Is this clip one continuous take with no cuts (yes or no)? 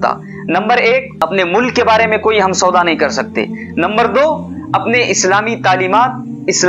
no